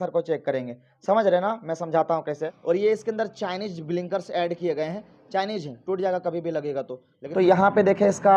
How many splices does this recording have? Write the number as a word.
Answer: two